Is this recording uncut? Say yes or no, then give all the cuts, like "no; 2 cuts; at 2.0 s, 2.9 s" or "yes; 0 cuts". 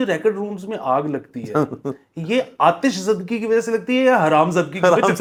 yes; 0 cuts